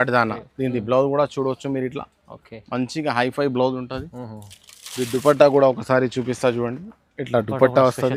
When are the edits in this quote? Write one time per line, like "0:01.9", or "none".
none

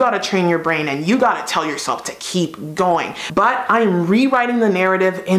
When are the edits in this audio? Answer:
0:03.2

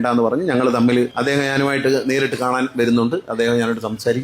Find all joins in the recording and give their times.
0:01.1

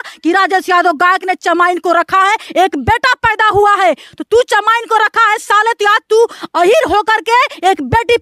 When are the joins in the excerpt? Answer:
none

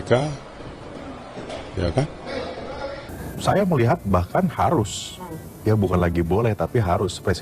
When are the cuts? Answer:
0:03.1

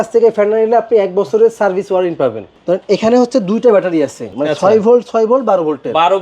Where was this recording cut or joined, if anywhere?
0:02.4
0:04.2

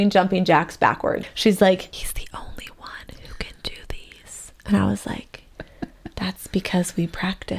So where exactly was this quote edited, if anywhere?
0:01.3
0:02.0

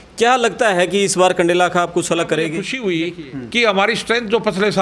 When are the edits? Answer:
0:02.7

